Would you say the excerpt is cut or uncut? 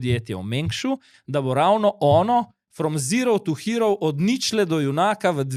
uncut